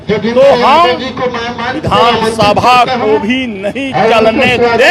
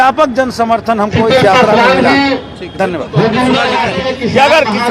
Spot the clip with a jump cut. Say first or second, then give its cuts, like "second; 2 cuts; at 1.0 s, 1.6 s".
second; 1 cut; at 3.7 s